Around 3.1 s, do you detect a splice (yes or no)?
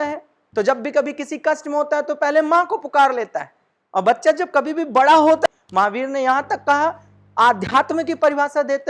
no